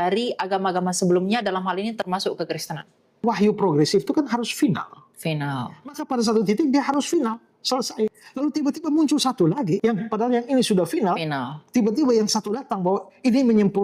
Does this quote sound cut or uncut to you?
cut